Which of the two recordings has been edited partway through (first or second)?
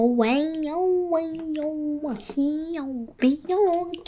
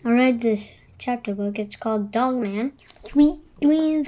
second